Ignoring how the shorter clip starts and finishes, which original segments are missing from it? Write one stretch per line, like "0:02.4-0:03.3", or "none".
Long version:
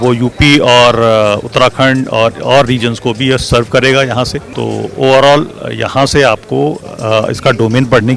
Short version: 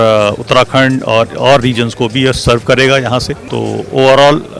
none